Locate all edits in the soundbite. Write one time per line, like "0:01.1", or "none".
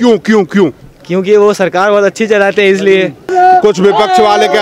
0:03.3